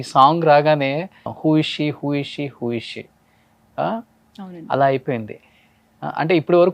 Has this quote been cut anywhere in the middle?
no; 0 cuts

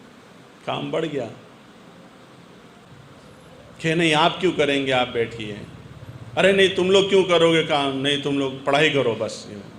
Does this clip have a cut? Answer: yes; 1 cut; at 2.8 s

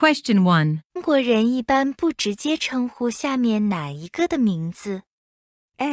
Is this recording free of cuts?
no; 1 cut; at 1.0 s

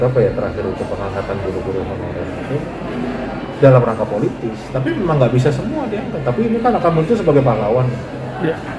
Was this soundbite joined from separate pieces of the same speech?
no; 0 cuts

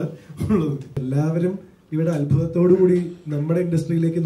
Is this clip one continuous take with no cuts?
no; 1 cut; at 1.0 s

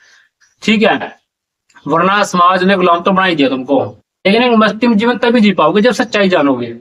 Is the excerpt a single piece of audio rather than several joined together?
no; 1 cut; at 4.1 s

